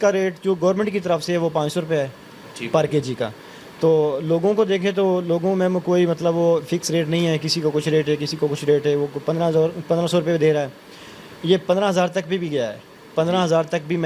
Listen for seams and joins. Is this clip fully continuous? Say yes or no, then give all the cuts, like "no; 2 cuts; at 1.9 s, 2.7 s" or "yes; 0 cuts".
yes; 0 cuts